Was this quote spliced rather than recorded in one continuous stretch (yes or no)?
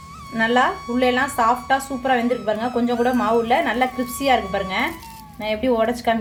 no